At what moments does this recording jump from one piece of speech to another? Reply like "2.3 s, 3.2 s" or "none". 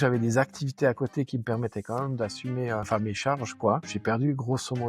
2.9 s, 3.9 s